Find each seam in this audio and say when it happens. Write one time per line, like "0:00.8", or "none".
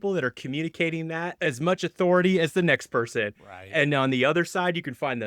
0:01.3